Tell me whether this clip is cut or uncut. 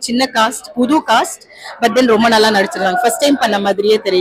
uncut